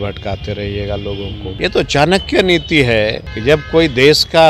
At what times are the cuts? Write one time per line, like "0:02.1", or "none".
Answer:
0:01.4
0:03.3